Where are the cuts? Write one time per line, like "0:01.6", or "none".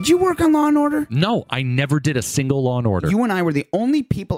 0:01.1
0:03.0